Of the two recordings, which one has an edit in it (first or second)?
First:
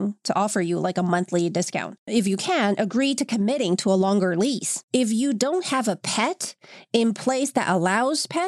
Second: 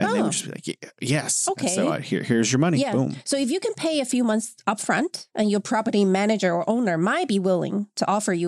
first